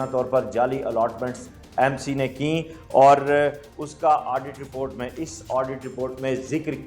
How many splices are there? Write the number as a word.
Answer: zero